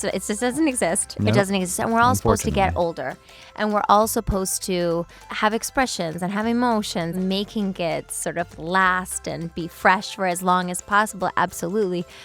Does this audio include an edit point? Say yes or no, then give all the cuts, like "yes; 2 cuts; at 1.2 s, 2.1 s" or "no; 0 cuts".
yes; 2 cuts; at 5.2 s, 7.1 s